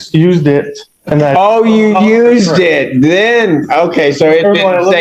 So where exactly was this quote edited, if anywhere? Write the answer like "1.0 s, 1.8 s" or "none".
none